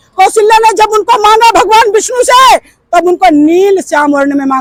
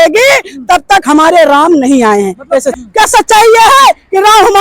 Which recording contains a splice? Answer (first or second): second